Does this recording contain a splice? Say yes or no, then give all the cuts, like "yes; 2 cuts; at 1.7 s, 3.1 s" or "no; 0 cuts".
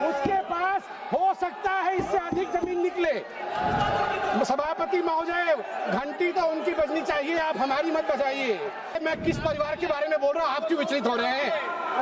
yes; 1 cut; at 9.0 s